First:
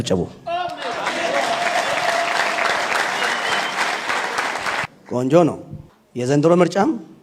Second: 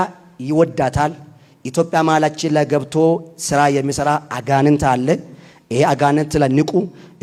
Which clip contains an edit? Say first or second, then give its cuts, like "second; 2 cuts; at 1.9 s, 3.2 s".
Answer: first; 1 cut; at 4.9 s